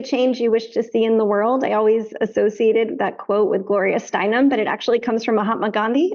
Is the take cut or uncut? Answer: uncut